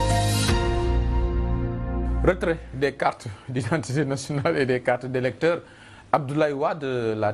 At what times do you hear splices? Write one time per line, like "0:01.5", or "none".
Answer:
none